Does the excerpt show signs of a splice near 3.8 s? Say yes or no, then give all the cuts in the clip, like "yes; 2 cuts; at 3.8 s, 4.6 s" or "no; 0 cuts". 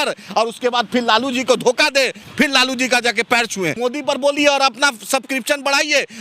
yes; 1 cut; at 3.8 s